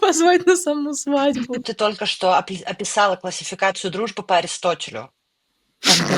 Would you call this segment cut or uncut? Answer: cut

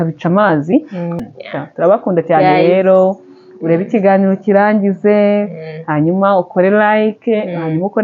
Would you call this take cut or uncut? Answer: cut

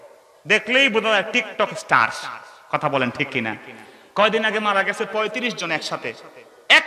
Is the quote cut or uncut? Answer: uncut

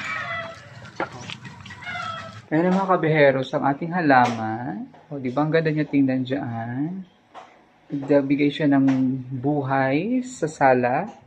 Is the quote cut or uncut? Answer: cut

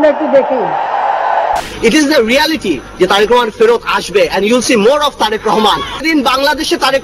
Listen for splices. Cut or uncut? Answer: cut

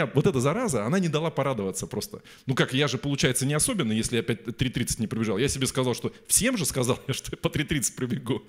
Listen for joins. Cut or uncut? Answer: uncut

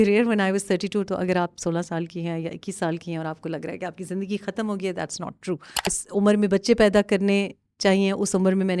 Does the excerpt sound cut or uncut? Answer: cut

